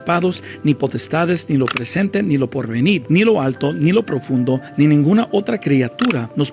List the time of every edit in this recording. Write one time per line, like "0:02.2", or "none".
none